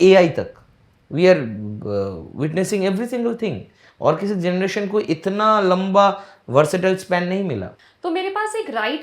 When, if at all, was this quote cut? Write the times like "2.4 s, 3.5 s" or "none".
7.7 s